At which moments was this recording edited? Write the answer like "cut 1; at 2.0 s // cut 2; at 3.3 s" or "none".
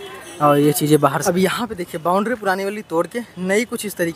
cut 1; at 1.2 s